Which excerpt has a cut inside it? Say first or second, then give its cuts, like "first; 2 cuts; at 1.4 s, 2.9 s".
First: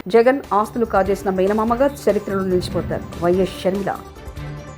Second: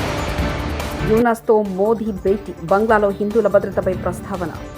second; 1 cut; at 1.0 s